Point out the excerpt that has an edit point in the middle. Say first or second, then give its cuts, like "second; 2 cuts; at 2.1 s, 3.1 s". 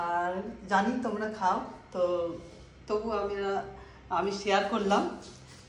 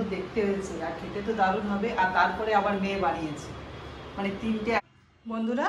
second; 1 cut; at 4.8 s